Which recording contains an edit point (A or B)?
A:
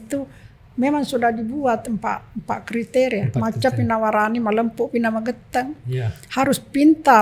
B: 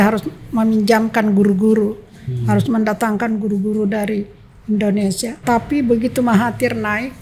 B